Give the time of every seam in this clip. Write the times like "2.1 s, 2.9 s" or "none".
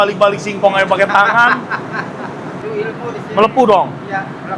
2.6 s